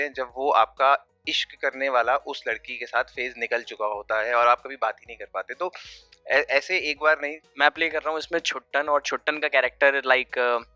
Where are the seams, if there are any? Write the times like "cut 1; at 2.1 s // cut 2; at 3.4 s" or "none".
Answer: cut 1; at 7.4 s